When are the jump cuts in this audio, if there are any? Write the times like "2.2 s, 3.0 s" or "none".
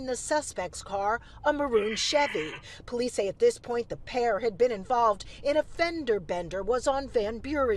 none